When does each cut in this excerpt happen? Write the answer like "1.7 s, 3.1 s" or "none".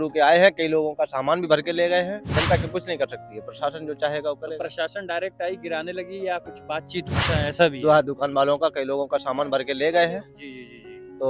2.3 s, 7.1 s